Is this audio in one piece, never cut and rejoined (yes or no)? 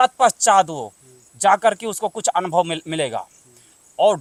yes